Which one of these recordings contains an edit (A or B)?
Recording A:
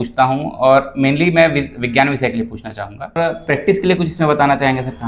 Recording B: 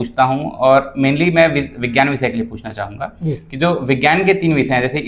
A